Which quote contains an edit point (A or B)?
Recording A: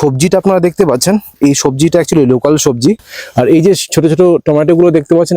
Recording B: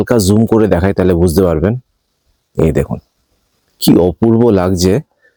A